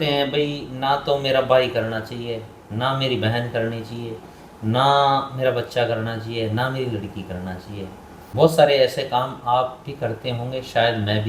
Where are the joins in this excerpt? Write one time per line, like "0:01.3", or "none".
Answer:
0:08.2